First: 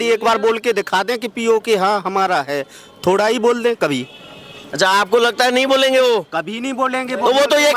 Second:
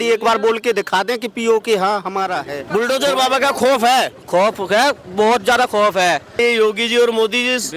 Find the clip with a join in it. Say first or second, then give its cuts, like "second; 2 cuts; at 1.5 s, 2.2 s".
second; 2 cuts; at 2.5 s, 6.4 s